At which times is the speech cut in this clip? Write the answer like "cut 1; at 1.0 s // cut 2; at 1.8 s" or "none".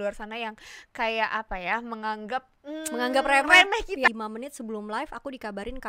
cut 1; at 4.1 s